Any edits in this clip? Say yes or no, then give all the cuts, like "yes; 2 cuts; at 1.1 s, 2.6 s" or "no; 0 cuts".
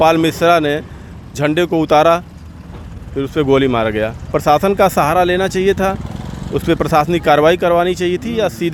no; 0 cuts